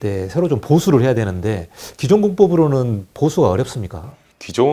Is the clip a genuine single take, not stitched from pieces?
yes; 0 cuts

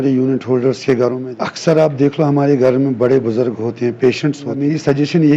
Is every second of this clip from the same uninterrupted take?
no; 2 cuts; at 1.2 s, 4.6 s

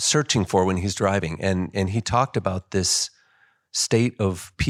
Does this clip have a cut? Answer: no; 0 cuts

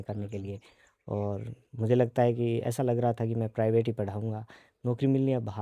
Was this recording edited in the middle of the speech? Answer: no; 0 cuts

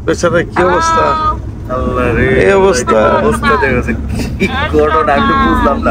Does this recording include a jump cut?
no; 0 cuts

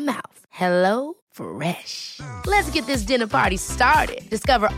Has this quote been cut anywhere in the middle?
no; 0 cuts

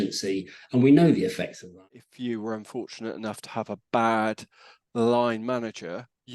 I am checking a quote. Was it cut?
yes; 1 cut; at 2.0 s

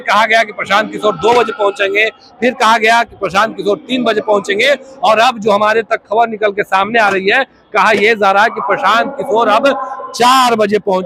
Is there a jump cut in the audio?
no; 0 cuts

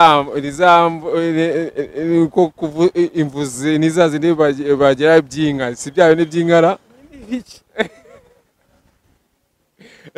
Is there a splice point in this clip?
no; 0 cuts

